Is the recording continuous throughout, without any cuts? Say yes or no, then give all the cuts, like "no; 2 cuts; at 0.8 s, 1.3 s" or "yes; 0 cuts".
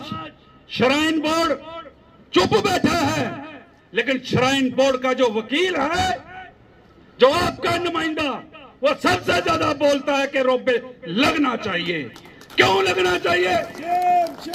yes; 0 cuts